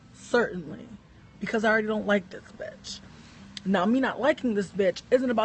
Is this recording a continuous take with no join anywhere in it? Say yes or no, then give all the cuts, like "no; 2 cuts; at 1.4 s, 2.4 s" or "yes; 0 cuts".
yes; 0 cuts